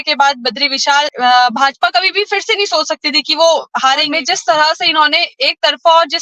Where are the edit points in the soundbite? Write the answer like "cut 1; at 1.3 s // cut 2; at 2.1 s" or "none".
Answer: cut 1; at 1.1 s // cut 2; at 4.1 s